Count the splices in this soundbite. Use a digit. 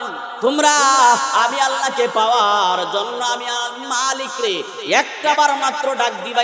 0